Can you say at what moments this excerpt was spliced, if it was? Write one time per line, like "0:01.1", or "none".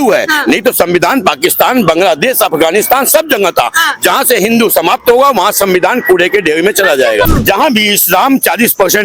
0:07.3

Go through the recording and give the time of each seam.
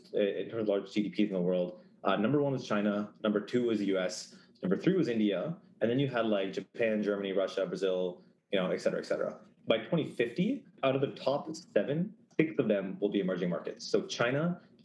0:09.6
0:10.7
0:12.2

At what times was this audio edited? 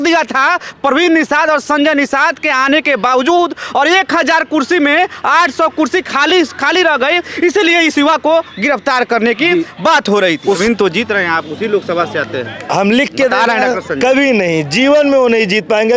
0:10.6

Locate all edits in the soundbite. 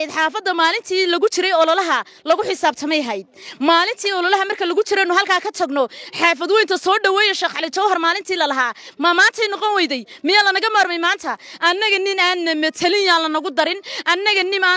none

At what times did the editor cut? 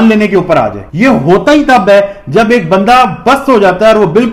none

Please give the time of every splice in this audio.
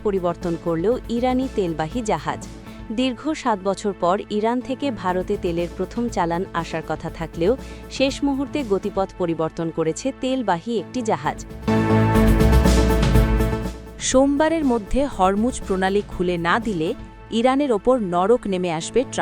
0:11.5
0:14.0

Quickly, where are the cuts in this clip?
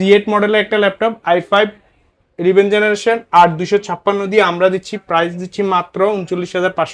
none

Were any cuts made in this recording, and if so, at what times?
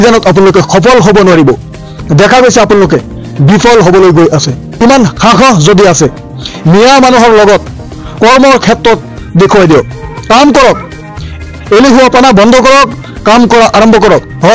0:04.6

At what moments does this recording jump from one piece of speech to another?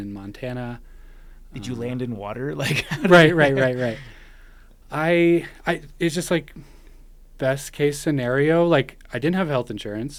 none

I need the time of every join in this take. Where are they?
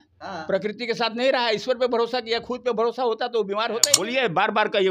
0:03.9

